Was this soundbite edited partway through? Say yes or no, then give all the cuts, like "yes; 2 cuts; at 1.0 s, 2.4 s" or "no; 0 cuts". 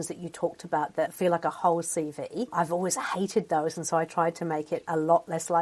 yes; 2 cuts; at 1.1 s, 2.5 s